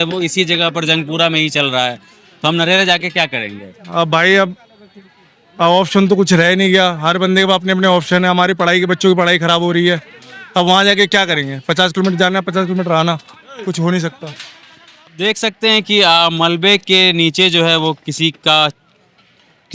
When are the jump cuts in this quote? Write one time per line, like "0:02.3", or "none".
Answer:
none